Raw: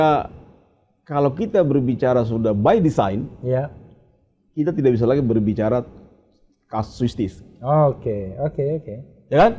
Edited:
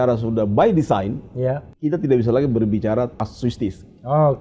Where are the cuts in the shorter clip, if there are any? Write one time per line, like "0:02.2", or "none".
0:01.7
0:03.2